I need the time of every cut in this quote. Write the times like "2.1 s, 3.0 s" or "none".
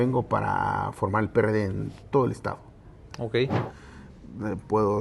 3.7 s